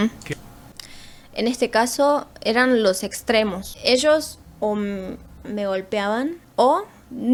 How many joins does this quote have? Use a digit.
0